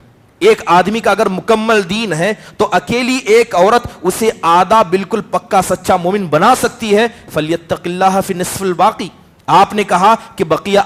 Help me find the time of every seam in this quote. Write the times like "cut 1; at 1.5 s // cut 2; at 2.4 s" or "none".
none